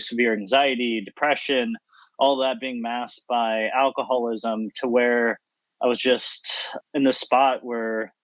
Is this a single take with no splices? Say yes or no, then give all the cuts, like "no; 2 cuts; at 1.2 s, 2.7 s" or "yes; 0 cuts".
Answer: no; 1 cut; at 6.7 s